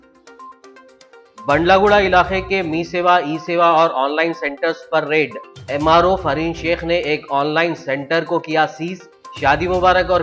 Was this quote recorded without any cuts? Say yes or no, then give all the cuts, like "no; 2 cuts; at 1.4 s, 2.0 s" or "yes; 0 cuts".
yes; 0 cuts